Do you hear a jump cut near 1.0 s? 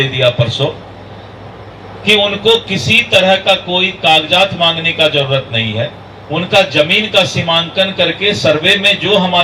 no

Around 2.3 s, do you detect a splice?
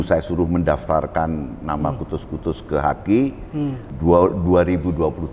no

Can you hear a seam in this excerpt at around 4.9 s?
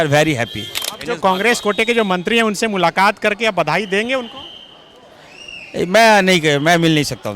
no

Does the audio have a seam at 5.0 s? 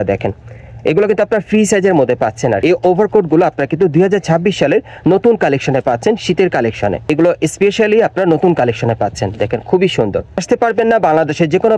no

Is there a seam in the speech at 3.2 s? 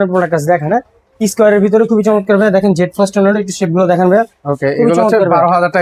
no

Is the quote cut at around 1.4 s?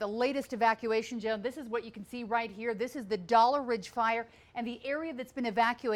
no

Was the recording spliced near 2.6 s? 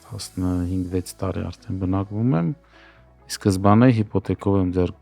no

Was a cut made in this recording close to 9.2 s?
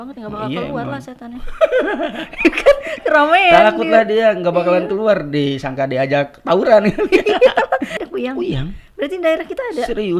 no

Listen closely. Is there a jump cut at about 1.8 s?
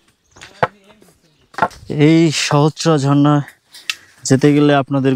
yes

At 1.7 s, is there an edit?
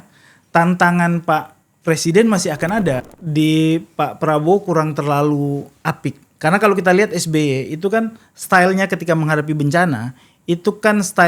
no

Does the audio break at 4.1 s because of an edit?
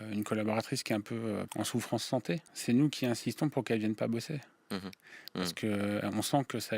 no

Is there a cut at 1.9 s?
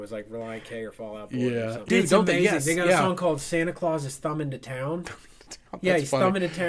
yes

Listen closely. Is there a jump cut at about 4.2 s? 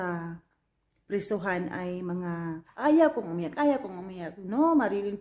no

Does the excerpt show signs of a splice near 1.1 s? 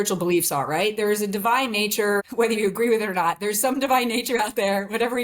no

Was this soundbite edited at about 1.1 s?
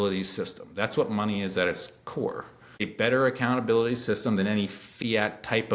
no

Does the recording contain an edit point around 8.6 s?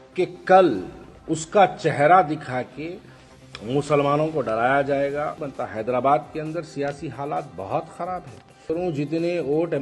yes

